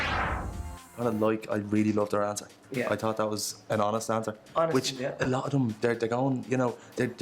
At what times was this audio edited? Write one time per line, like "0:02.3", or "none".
0:00.9